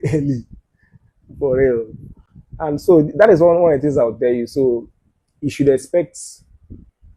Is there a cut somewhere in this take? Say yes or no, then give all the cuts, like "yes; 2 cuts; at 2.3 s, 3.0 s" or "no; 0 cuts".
no; 0 cuts